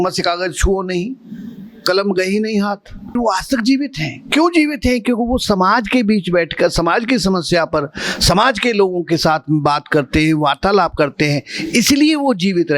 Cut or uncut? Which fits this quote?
cut